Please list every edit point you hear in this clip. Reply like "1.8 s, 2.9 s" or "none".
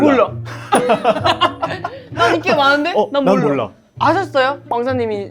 none